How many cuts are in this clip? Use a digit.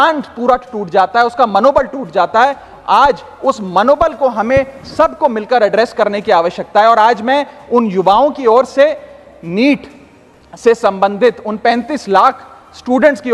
0